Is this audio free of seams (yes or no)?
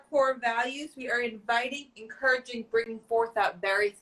yes